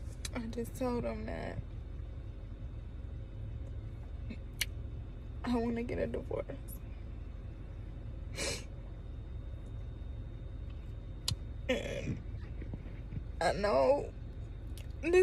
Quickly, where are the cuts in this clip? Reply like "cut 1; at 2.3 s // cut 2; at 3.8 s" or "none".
none